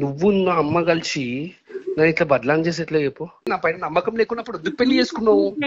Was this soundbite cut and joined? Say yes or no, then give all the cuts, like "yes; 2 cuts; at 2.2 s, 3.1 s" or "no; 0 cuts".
yes; 1 cut; at 3.5 s